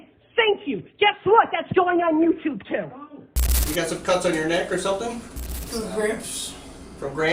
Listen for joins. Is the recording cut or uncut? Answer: cut